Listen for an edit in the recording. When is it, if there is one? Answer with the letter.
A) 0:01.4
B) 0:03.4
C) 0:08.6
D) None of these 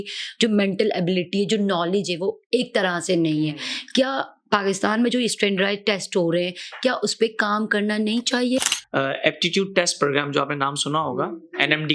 C